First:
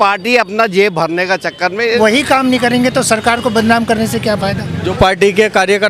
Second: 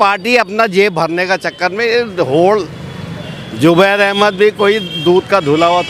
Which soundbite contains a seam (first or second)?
first